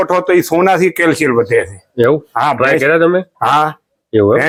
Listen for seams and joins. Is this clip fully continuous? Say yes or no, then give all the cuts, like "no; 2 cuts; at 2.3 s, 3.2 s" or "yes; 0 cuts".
yes; 0 cuts